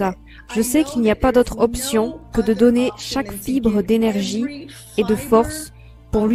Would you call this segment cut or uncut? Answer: uncut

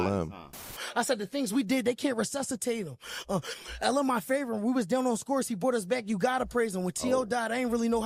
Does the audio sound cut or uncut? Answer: uncut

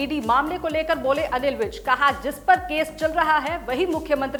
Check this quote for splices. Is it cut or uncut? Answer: uncut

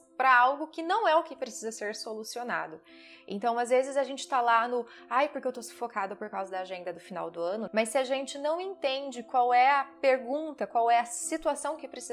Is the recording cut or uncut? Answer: cut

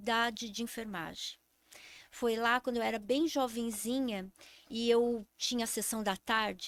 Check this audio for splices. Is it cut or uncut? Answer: uncut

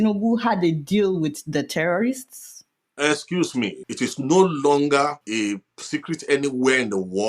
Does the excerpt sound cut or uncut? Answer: cut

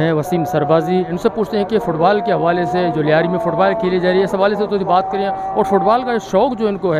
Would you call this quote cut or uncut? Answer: cut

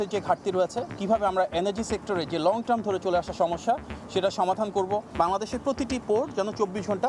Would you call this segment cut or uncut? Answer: cut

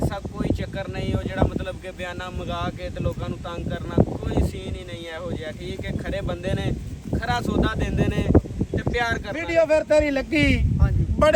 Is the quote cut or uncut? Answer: cut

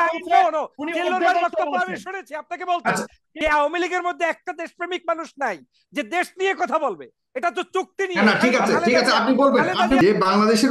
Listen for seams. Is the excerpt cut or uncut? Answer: cut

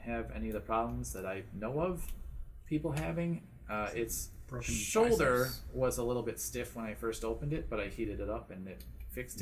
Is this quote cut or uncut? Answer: uncut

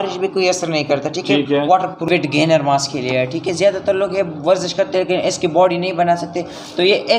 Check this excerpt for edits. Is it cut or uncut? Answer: cut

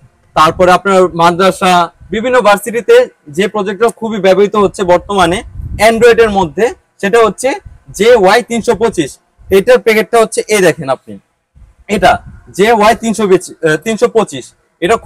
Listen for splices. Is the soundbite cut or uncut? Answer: uncut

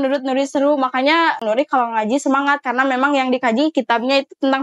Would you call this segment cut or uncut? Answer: cut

